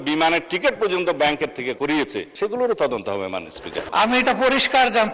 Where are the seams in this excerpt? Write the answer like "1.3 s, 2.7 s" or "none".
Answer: 1.8 s, 3.8 s

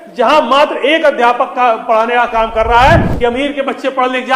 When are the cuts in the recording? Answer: 3.1 s

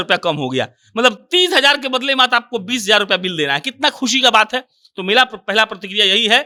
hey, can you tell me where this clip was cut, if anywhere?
none

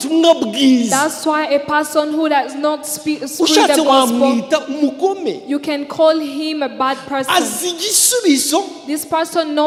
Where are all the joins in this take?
none

